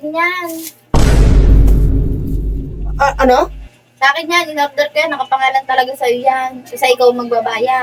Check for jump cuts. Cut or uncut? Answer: uncut